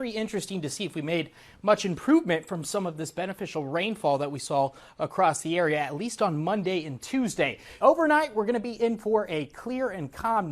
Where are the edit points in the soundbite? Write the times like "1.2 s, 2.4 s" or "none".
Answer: 7.7 s